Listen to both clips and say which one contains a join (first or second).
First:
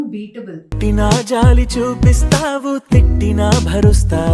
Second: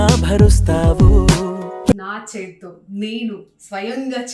second